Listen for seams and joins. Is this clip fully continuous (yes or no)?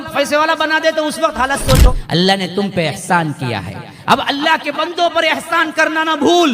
no